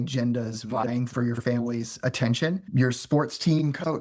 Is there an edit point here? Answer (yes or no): yes